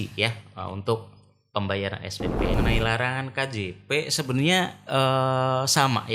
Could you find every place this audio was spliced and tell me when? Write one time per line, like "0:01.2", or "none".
0:02.6